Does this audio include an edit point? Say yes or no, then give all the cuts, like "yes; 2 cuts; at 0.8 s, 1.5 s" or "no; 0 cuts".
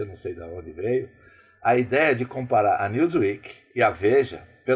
no; 0 cuts